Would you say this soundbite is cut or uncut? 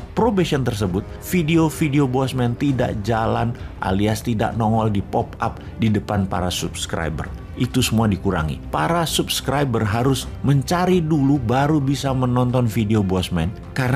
uncut